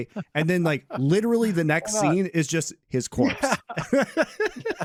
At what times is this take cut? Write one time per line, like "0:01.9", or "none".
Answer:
none